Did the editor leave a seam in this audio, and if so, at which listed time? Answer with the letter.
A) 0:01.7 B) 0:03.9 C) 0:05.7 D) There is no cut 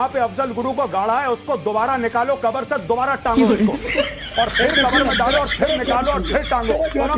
D